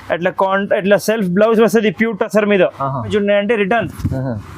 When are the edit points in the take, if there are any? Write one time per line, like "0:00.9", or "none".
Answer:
0:03.1